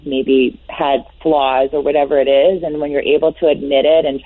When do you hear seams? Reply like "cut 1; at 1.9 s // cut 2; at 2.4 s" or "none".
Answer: none